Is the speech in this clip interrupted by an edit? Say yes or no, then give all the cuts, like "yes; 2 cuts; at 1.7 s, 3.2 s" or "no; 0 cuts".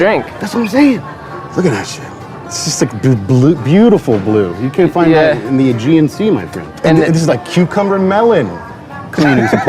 yes; 2 cuts; at 1.1 s, 6.6 s